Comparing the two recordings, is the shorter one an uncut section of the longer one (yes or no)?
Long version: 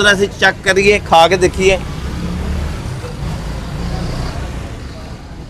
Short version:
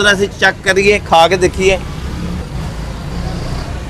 no